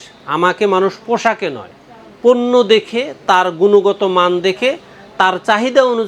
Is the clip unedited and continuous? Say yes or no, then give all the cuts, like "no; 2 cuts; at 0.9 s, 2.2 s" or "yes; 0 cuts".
yes; 0 cuts